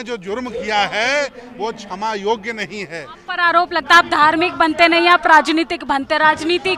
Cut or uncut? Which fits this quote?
cut